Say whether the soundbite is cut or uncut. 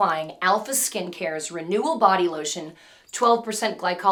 uncut